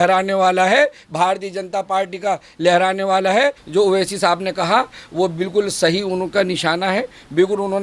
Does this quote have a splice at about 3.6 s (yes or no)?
yes